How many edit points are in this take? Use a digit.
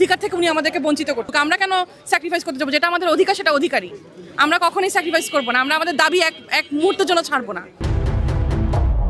2